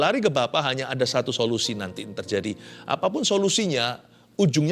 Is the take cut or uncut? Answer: cut